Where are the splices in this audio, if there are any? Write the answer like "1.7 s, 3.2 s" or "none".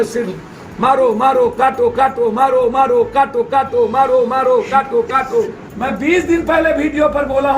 5.7 s